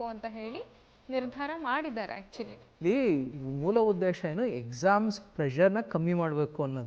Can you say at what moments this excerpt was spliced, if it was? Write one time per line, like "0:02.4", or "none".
0:02.8